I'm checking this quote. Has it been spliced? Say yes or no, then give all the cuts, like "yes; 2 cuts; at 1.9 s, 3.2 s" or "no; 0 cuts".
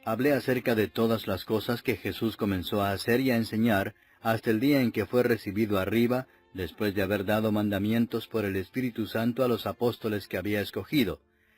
yes; 1 cut; at 1.9 s